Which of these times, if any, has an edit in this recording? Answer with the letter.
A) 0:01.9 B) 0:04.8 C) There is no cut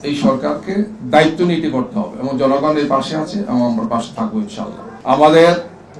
B